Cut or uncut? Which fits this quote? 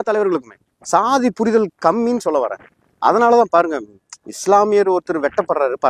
uncut